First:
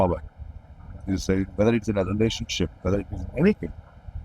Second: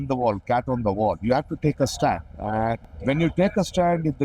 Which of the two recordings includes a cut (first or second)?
second